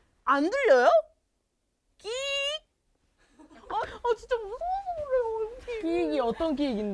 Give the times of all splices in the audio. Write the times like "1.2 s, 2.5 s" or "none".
3.7 s